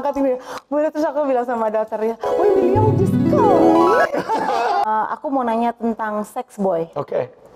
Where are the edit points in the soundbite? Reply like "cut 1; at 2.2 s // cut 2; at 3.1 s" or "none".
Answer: cut 1; at 4.9 s

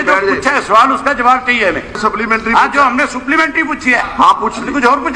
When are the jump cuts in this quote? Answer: cut 1; at 2.0 s

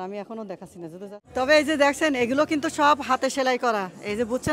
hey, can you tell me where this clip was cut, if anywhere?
cut 1; at 1.2 s

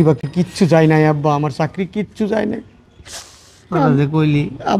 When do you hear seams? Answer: none

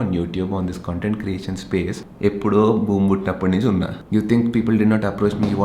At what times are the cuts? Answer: cut 1; at 2.0 s // cut 2; at 4.0 s

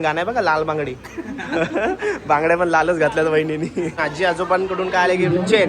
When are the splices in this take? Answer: cut 1; at 4.0 s

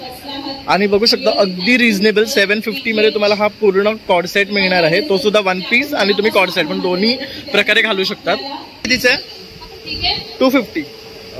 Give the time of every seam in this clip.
cut 1; at 8.8 s

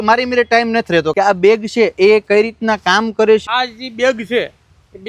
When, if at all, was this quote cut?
cut 1; at 1.1 s // cut 2; at 3.4 s

